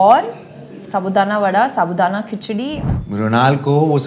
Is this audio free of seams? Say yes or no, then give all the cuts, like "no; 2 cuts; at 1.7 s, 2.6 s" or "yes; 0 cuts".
no; 1 cut; at 2.8 s